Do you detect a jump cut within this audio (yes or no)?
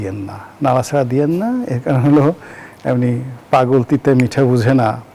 no